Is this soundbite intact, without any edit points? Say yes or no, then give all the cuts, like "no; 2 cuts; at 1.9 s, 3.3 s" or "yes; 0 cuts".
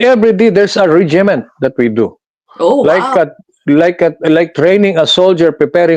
yes; 0 cuts